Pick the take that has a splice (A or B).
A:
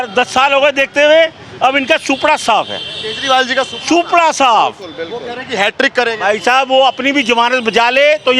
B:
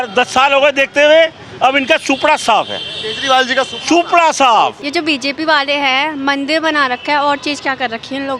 B